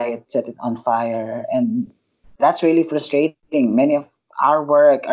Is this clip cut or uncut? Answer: uncut